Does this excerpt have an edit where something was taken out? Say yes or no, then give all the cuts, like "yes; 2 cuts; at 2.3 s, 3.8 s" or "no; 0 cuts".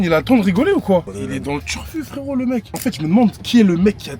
yes; 2 cuts; at 1.1 s, 2.7 s